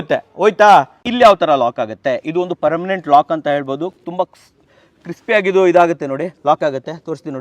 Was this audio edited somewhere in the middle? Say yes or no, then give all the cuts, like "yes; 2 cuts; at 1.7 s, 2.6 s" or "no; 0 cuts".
yes; 1 cut; at 1.0 s